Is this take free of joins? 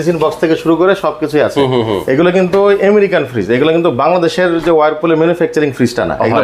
yes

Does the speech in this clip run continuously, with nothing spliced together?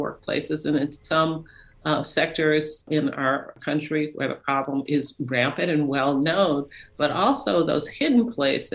no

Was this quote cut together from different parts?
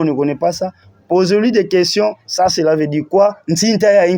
no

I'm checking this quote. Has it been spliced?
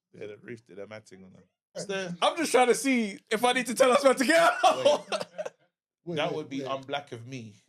yes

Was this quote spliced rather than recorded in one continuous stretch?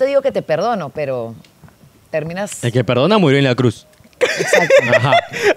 no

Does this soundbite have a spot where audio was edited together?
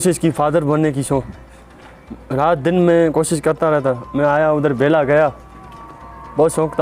no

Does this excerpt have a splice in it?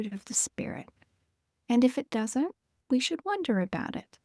yes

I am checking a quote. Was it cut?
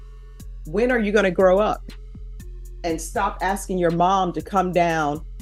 no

